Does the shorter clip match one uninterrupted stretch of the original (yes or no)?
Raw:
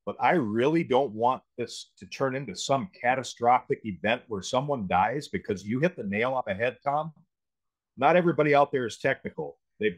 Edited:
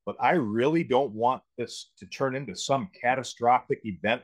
yes